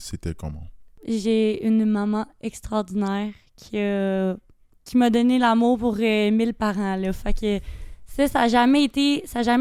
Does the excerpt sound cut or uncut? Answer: cut